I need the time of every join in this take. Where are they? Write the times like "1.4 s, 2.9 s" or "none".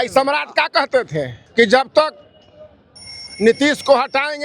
1.4 s